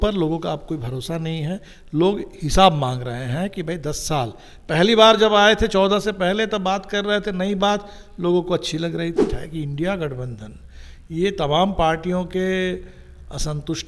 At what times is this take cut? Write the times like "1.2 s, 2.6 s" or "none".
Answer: 9.3 s